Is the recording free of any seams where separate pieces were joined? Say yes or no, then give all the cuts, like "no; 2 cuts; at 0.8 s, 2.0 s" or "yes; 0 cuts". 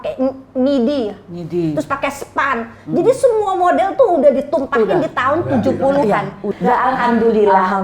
no; 1 cut; at 6.5 s